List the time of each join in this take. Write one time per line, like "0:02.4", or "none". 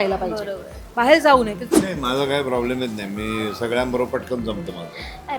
0:01.7